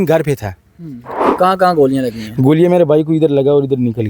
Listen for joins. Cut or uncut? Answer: cut